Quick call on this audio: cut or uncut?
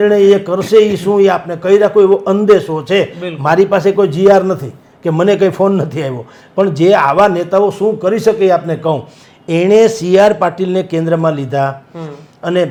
uncut